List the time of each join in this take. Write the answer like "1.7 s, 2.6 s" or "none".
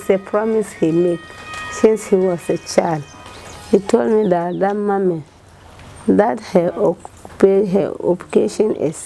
none